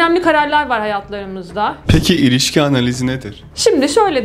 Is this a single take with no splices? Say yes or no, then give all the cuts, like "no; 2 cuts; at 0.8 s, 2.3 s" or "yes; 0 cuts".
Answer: no; 1 cut; at 1.8 s